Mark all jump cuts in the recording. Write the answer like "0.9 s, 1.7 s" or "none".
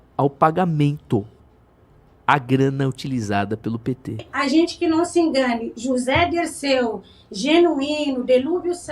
4.3 s